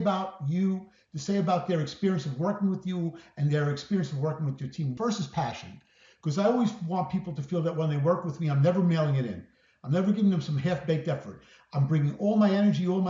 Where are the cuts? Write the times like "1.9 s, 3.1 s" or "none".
4.9 s